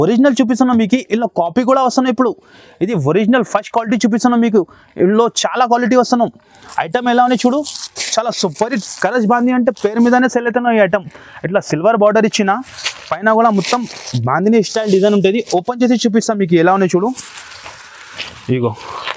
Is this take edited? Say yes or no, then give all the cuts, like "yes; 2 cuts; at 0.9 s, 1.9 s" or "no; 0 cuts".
no; 0 cuts